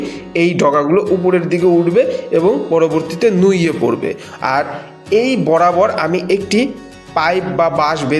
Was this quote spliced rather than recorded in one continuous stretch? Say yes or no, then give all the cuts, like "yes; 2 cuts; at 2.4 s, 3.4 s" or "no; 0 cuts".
no; 0 cuts